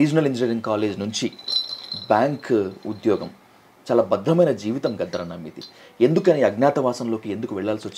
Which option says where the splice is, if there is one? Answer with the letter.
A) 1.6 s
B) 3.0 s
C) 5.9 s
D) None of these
D